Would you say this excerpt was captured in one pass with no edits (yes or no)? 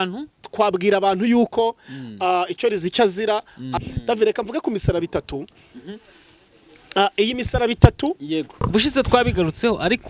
no